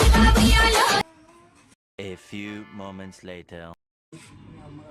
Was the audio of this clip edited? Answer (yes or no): no